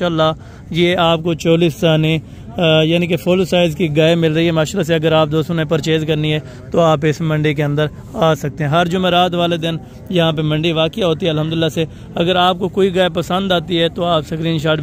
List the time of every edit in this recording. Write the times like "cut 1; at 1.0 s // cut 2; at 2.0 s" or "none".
none

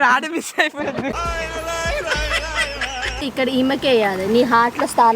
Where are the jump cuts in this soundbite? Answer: cut 1; at 1.0 s // cut 2; at 3.2 s

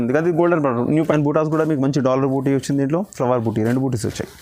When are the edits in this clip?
cut 1; at 1.1 s

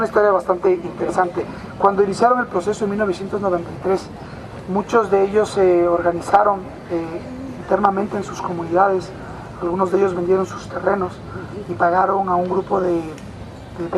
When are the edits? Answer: cut 1; at 8.1 s

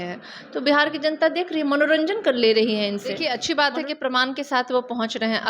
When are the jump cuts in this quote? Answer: cut 1; at 3.2 s

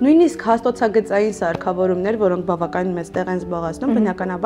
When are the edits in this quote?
none

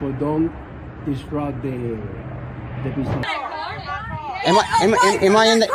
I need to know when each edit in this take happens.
cut 1; at 3.2 s

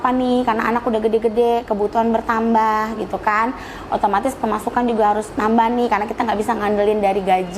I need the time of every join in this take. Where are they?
none

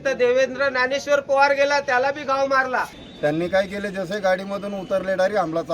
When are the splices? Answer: cut 1; at 3.0 s

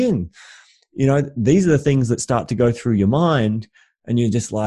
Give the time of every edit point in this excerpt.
none

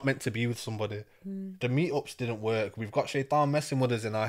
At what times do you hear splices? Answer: none

